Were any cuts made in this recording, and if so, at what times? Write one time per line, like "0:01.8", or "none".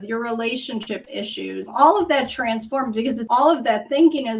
0:01.7
0:03.2